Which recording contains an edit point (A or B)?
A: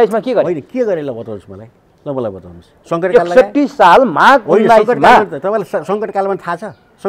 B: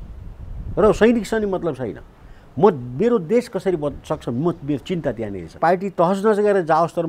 B